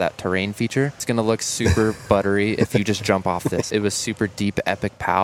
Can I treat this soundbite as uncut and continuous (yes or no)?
no